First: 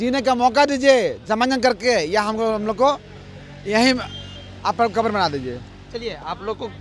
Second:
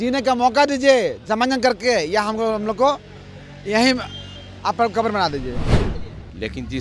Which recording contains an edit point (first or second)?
second